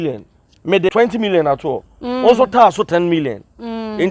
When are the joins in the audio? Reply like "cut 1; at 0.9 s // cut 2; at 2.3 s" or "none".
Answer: cut 1; at 0.9 s